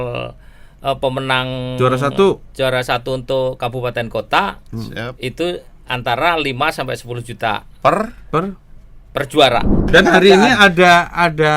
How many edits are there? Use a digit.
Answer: 1